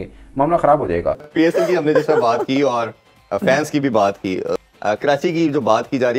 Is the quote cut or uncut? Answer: uncut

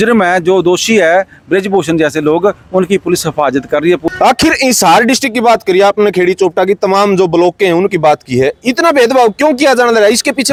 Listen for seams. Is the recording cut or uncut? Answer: uncut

